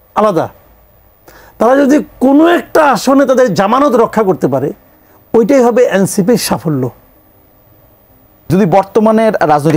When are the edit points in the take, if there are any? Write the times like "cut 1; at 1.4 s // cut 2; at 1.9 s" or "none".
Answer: cut 1; at 8.5 s